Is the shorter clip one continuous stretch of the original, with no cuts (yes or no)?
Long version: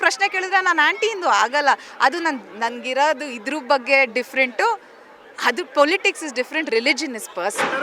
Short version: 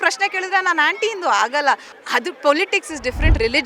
no